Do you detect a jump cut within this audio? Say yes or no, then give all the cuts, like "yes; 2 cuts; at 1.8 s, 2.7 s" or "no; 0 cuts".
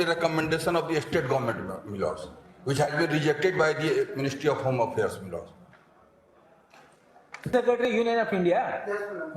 yes; 1 cut; at 7.5 s